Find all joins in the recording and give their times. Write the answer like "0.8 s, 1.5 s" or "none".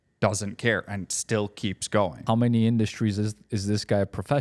2.2 s